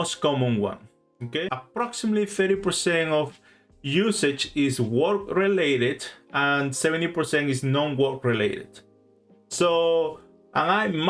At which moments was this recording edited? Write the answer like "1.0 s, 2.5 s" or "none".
1.6 s